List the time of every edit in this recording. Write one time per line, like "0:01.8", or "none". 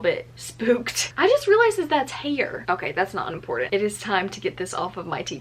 0:01.0
0:03.7